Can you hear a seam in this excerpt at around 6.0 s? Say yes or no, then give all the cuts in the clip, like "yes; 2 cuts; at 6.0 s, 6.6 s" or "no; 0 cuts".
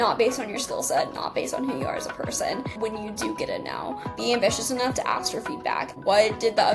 yes; 3 cuts; at 2.8 s, 4.2 s, 6.0 s